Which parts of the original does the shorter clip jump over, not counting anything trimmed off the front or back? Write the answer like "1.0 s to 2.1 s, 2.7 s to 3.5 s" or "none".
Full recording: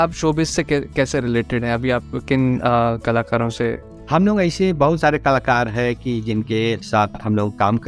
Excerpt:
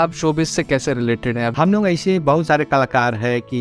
1.1 s to 3.6 s

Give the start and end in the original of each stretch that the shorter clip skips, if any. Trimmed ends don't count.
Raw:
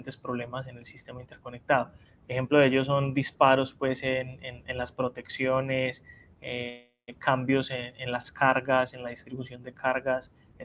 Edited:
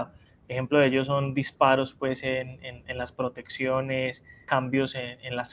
6.1 s to 7.0 s

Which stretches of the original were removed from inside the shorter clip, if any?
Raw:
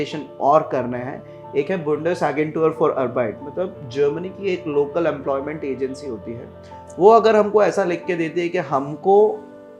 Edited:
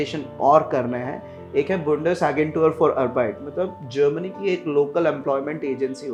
none

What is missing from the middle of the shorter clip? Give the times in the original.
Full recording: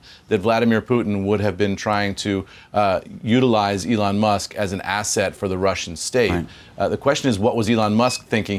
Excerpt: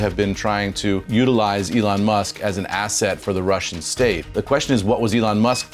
2.5 s to 3.2 s, 6.5 s to 6.9 s

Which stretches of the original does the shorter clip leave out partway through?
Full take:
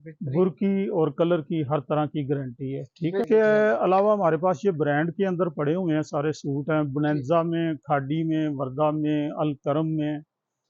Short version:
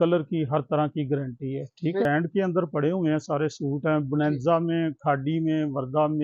3.3 s to 4.9 s

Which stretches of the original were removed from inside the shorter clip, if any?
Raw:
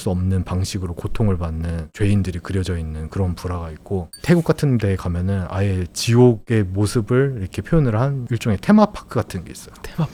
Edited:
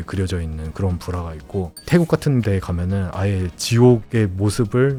none

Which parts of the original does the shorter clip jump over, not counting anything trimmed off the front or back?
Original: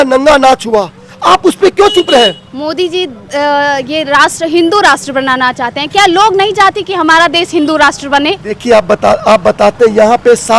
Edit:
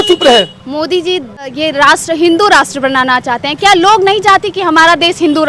3.3 s to 3.8 s

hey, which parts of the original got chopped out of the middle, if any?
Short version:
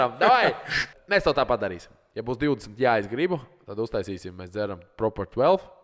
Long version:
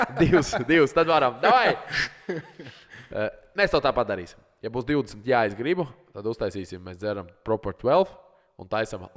2.2 s to 3.4 s

